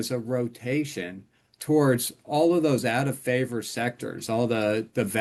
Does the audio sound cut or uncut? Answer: uncut